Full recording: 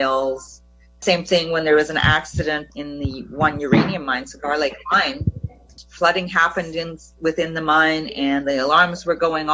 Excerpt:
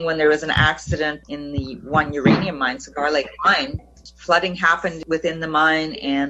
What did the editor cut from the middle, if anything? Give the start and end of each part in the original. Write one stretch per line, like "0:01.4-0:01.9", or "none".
0:05.3-0:05.5
0:06.7-0:07.1

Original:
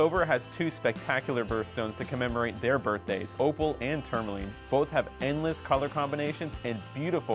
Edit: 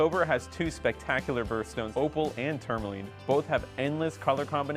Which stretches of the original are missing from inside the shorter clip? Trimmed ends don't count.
0:01.9-0:03.3

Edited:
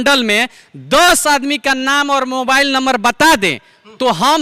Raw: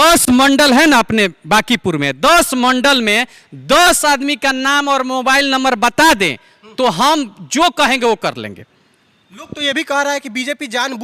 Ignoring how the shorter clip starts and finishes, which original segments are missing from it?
none

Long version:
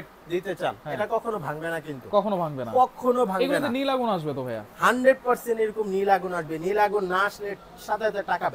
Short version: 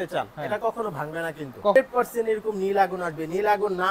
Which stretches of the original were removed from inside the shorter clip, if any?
0:02.2-0:05.1

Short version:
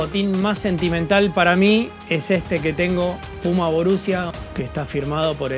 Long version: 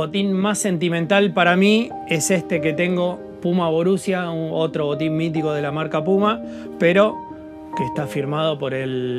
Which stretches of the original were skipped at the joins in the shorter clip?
0:04.3-0:07.5

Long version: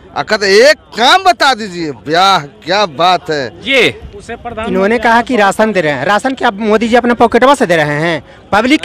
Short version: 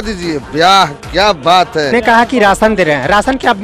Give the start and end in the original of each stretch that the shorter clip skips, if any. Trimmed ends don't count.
0:03.5-0:04.9

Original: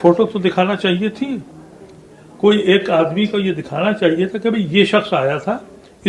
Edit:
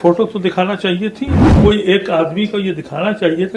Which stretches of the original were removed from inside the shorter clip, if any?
0:01.4-0:02.2

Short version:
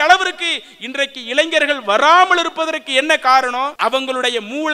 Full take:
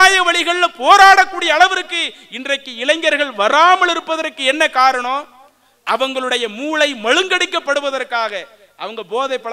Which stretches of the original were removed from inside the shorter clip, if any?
0:05.2-0:05.8

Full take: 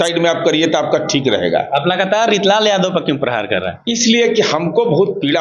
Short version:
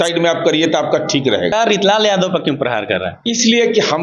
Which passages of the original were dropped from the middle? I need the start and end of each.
0:01.5-0:02.1

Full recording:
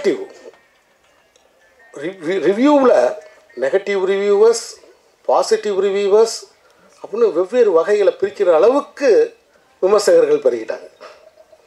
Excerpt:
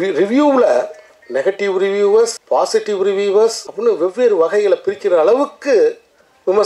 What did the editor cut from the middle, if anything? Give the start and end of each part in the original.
0:04.7-0:05.2
0:06.4-0:07.0

